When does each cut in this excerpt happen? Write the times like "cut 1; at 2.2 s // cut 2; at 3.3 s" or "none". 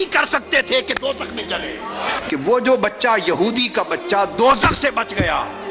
cut 1; at 2.1 s